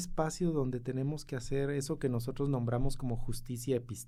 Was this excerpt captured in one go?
yes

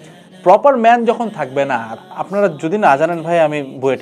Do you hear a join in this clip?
yes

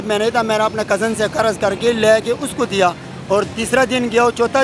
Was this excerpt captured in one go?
yes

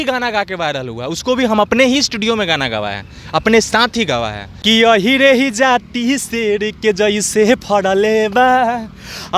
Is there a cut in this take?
yes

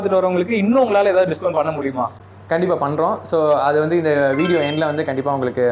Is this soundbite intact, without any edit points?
no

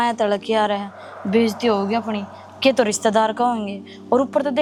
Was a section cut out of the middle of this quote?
no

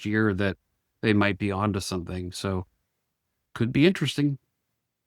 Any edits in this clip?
yes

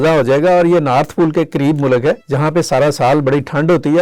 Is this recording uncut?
no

